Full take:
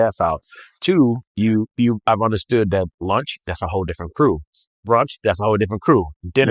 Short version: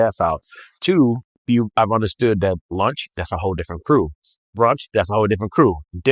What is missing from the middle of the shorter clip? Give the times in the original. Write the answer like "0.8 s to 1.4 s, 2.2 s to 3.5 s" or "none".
1.4 s to 1.7 s